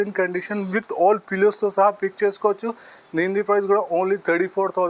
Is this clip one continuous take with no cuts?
yes; 0 cuts

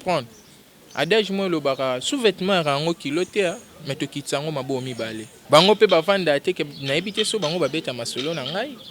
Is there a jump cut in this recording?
yes; 1 cut; at 5.3 s

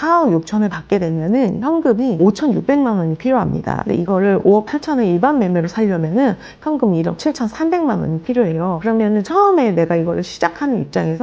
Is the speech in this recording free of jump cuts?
no; 3 cuts; at 2.1 s, 3.8 s, 8.8 s

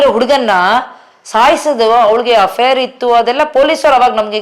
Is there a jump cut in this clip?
no; 0 cuts

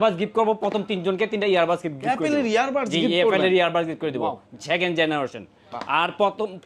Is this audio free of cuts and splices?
yes; 0 cuts

